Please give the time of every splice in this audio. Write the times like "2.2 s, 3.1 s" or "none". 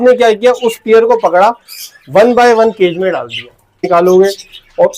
3.9 s